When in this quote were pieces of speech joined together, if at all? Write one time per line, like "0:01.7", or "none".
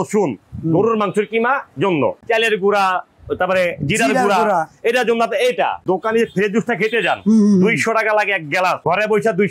0:02.2
0:05.8